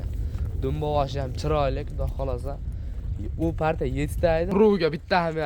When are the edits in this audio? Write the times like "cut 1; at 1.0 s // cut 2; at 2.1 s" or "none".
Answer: cut 1; at 4.5 s

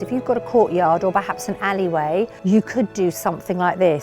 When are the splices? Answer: cut 1; at 2.4 s

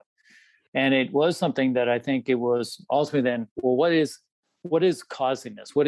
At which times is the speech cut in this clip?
none

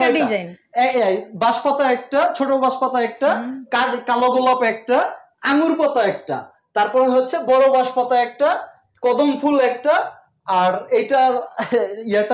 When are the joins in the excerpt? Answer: none

